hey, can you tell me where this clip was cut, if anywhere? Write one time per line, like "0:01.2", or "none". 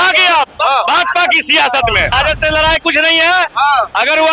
0:02.1